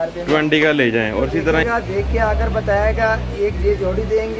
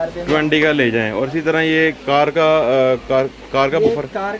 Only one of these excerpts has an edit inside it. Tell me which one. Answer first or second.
first